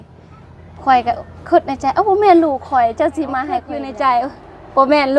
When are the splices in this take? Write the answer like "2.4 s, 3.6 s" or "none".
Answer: 3.8 s